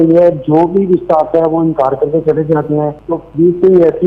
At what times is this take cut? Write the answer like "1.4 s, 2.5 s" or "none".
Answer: 3.0 s